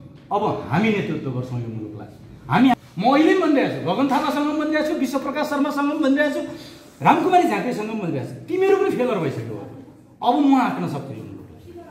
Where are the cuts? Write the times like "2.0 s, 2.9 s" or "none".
2.7 s